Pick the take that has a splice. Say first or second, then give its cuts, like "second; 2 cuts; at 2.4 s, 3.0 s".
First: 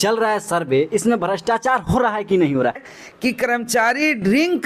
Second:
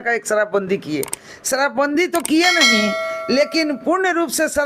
first; 1 cut; at 2.8 s